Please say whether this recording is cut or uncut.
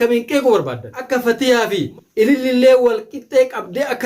cut